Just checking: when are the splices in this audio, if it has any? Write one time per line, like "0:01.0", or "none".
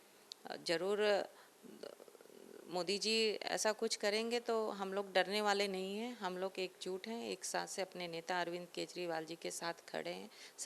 none